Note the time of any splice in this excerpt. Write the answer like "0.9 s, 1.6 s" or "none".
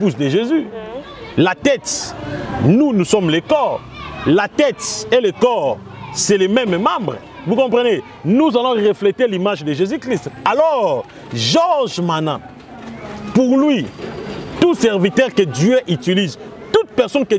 none